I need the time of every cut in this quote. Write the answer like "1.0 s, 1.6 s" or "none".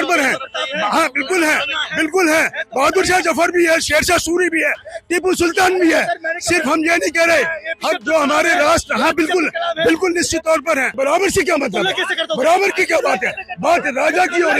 10.9 s